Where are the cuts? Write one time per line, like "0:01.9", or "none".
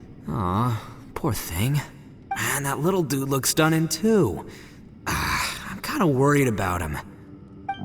0:02.4